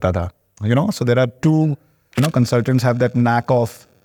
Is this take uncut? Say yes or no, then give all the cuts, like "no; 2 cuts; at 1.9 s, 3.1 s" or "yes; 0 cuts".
no; 1 cut; at 2.2 s